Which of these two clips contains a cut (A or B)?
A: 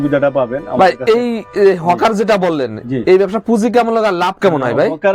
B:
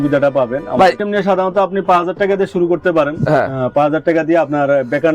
B